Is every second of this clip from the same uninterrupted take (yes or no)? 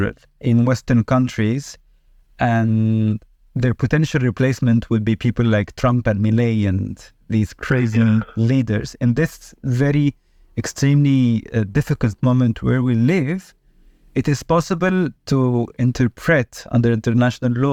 yes